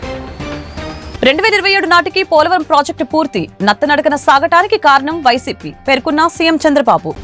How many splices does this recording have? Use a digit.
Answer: 1